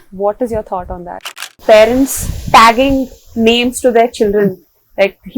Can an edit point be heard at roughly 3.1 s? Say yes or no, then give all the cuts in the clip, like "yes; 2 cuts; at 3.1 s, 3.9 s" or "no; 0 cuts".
no; 1 cut; at 1.5 s